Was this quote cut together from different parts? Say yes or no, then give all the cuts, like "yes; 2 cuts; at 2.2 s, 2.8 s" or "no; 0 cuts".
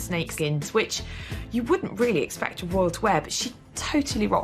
no; 0 cuts